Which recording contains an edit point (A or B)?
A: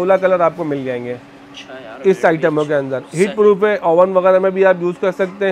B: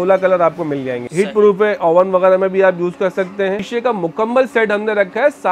B